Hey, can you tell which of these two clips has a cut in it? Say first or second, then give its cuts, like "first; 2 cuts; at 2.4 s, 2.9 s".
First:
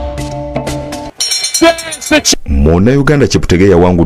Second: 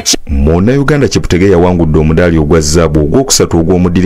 first; 1 cut; at 1.0 s